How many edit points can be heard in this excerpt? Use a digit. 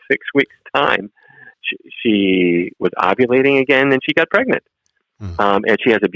1